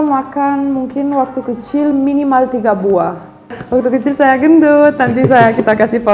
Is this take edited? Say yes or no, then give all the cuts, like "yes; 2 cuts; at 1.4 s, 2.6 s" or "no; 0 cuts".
yes; 1 cut; at 3.5 s